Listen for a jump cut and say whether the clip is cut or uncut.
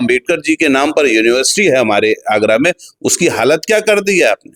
uncut